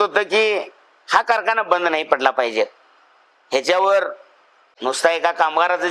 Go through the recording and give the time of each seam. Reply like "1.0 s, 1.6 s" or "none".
none